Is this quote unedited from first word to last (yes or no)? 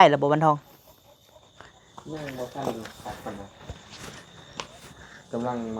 yes